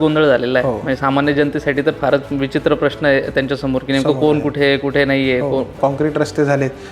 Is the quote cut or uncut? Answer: cut